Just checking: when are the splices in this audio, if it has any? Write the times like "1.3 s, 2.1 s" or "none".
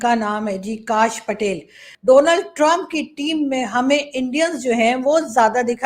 1.9 s

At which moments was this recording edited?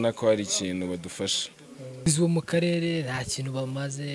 2.0 s

